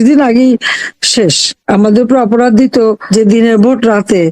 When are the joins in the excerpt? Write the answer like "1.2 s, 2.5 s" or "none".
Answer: 1.5 s, 3.0 s